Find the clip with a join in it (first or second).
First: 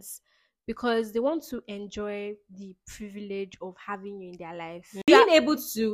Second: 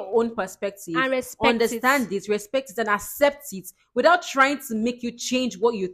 first